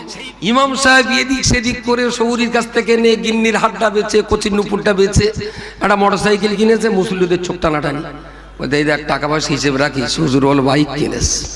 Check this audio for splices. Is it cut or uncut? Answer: uncut